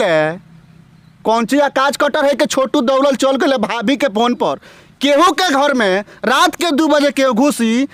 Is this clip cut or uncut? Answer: uncut